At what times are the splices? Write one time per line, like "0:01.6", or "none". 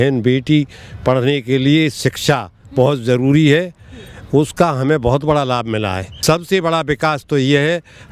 0:06.1